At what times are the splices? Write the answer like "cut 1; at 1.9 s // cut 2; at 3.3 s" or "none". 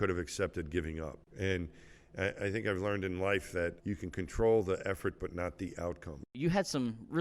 cut 1; at 1.2 s // cut 2; at 3.8 s // cut 3; at 6.4 s

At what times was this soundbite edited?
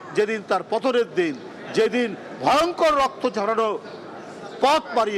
none

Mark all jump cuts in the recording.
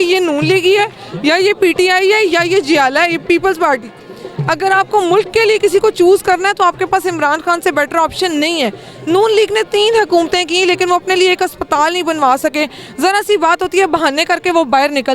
none

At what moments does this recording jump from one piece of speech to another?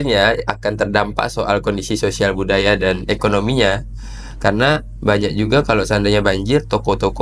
none

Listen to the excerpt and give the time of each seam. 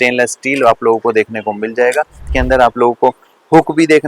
cut 1; at 2.2 s

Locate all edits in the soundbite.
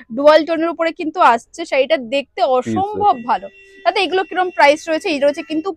none

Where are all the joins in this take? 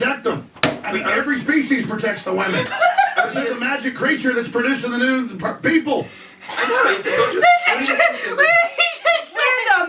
none

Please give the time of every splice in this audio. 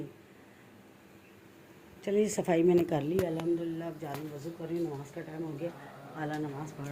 none

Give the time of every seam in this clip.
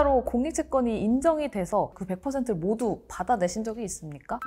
cut 1; at 1.9 s

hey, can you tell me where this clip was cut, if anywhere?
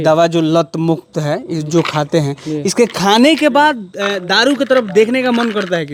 none

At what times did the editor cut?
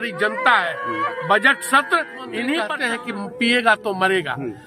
cut 1; at 2.8 s

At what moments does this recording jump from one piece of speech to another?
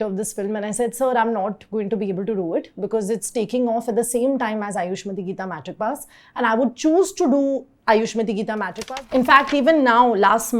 cut 1; at 8.8 s

